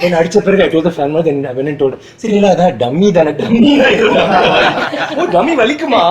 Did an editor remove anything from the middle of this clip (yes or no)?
no